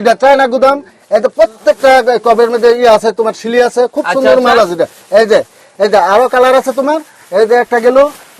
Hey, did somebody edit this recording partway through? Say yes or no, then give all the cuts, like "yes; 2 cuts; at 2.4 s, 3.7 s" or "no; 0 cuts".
no; 0 cuts